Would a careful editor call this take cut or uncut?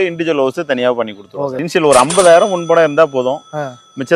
cut